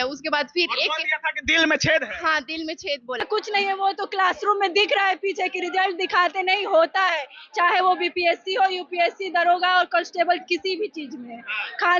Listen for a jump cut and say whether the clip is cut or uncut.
cut